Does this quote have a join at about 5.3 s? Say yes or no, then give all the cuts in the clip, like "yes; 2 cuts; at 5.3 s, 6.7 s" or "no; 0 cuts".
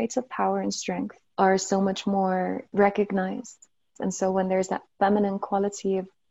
no; 3 cuts; at 1.2 s, 2.6 s, 3.9 s